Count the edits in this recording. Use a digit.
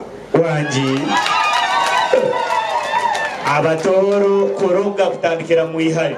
0